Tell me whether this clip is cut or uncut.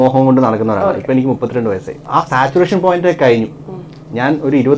cut